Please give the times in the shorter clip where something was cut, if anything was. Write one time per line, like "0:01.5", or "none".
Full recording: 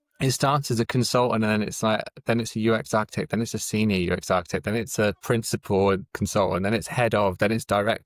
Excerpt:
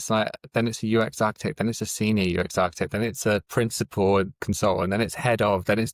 none